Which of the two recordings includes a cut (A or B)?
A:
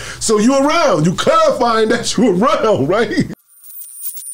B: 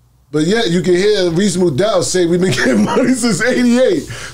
A